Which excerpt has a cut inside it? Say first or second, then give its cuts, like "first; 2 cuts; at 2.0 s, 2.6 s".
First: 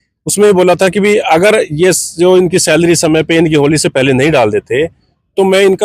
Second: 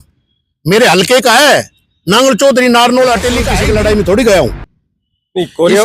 second; 1 cut; at 3.5 s